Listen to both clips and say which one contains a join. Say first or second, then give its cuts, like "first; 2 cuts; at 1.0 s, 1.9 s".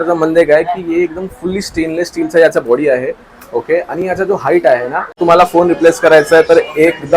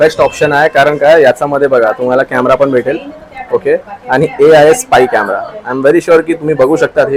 first; 1 cut; at 5.2 s